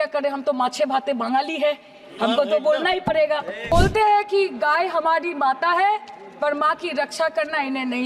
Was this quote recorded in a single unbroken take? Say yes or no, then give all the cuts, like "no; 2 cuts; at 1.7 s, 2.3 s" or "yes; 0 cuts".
no; 1 cut; at 3.7 s